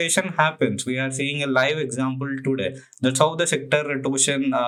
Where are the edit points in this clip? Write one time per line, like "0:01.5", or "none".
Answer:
none